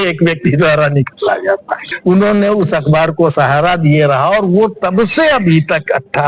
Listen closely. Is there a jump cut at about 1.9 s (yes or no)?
yes